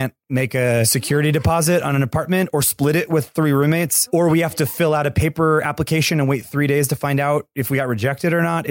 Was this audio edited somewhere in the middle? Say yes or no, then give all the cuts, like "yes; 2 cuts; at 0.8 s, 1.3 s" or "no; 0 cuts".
yes; 2 cuts; at 1.1 s, 4.0 s